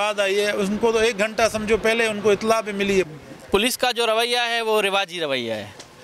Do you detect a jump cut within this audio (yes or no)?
yes